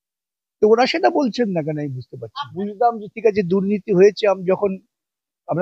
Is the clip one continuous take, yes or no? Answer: no